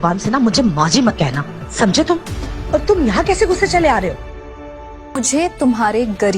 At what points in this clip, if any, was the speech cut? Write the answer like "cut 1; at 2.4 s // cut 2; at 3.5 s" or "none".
cut 1; at 5.2 s